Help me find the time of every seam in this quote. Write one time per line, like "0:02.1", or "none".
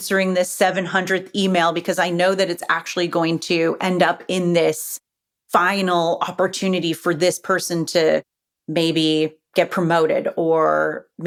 none